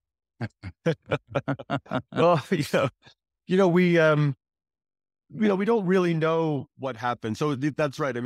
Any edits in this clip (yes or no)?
no